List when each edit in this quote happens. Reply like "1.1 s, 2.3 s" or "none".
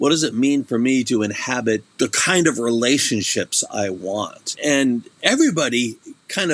1.9 s, 4.6 s